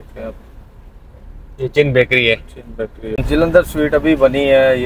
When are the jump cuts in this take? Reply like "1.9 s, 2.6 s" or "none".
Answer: 3.2 s